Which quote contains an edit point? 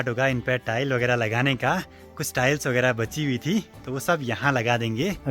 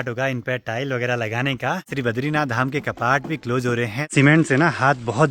second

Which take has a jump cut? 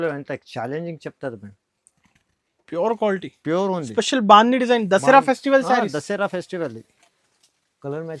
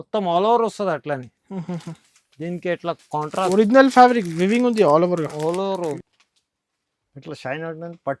second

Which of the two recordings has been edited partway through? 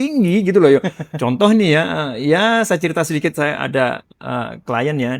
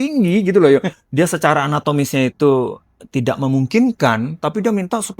second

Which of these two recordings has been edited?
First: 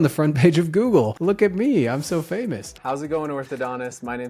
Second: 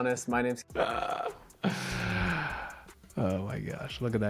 first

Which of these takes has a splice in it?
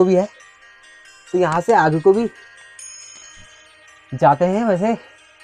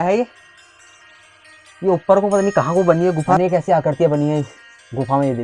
second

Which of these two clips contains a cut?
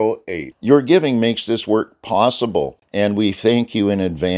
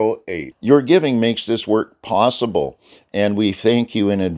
first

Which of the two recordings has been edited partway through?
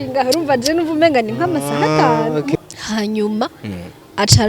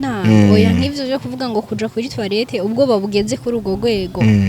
first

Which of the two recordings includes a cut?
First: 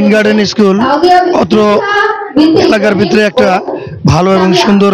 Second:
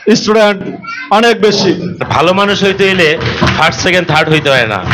second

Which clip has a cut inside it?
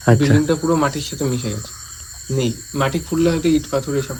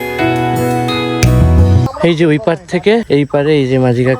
second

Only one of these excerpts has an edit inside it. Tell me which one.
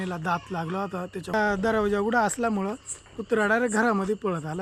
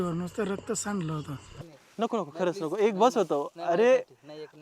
second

